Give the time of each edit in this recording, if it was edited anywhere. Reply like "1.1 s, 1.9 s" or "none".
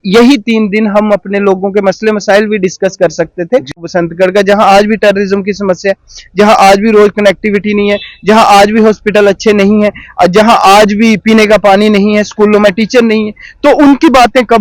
3.8 s